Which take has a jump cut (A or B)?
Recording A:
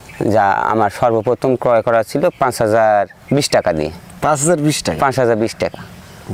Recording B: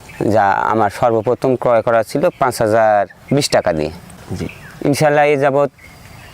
B